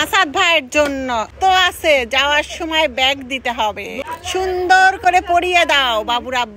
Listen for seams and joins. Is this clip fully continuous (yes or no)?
no